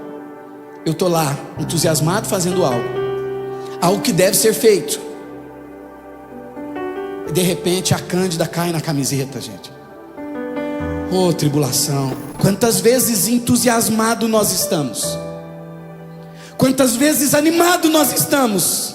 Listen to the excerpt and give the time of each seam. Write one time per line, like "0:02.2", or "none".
0:12.2